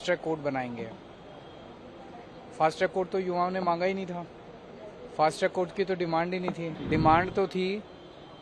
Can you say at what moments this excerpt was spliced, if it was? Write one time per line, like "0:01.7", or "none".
0:06.7